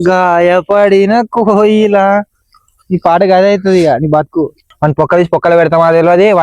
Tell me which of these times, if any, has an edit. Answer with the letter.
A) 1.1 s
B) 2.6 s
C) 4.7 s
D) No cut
C